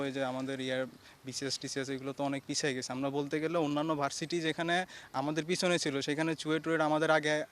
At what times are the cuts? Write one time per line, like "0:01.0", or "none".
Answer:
none